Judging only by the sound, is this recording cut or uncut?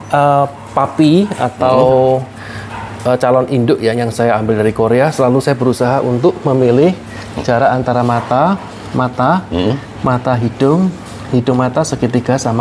uncut